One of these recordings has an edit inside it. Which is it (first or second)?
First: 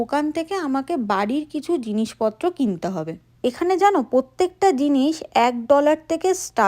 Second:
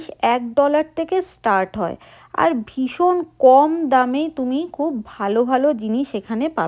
first